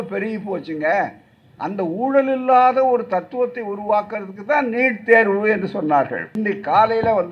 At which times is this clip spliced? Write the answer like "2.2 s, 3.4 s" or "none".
6.3 s